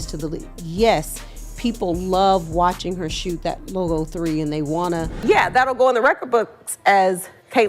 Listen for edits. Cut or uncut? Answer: cut